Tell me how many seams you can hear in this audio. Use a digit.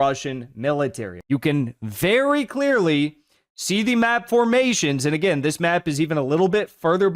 1